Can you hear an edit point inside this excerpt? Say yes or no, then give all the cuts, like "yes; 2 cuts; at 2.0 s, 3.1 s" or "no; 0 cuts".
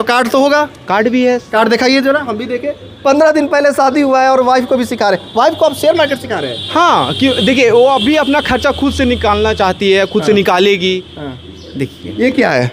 no; 0 cuts